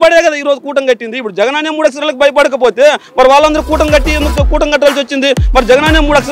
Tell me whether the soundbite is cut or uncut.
uncut